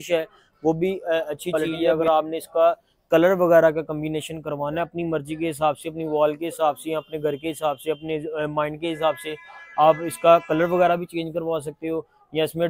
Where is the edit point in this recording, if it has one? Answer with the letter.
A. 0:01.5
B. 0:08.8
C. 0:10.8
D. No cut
A